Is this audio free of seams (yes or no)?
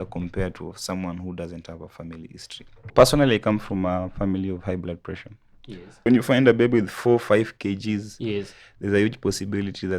no